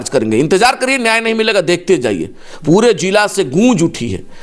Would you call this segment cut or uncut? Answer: uncut